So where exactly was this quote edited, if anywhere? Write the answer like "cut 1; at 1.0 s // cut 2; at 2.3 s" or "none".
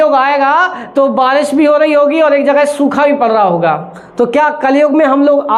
none